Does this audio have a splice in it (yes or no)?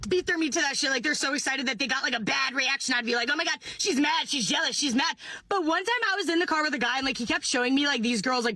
yes